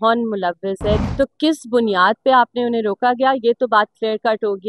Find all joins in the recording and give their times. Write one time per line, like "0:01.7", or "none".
0:01.0